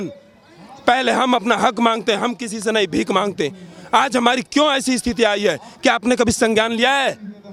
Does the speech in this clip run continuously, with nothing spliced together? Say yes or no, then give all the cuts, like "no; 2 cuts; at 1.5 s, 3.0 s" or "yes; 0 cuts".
yes; 0 cuts